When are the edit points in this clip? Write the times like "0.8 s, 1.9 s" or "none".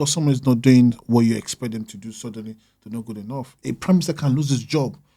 3.5 s